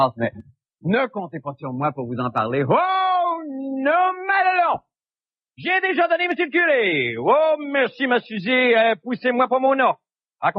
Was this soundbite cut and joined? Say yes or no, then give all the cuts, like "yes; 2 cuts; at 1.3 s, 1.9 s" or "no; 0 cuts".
no; 0 cuts